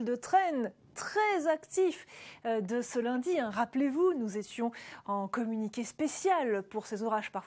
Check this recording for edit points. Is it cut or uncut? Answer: uncut